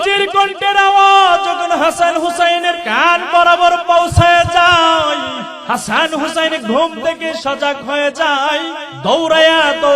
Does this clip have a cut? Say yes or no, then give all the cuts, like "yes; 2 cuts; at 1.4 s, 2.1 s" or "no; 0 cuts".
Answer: yes; 3 cuts; at 2.9 s, 5.5 s, 8.8 s